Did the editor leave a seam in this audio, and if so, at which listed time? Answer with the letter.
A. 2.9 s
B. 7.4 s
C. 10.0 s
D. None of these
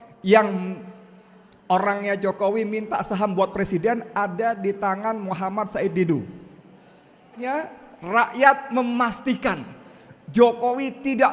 B